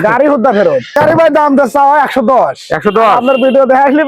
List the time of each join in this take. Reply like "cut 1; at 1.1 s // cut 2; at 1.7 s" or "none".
cut 1; at 1.0 s